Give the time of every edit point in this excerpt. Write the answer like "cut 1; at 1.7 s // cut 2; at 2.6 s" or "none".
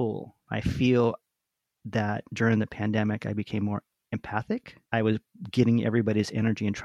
none